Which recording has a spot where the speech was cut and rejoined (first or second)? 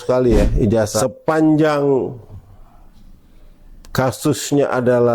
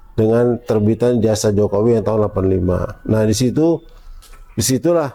first